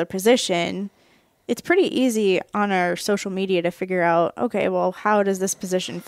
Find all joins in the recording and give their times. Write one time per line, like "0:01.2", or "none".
none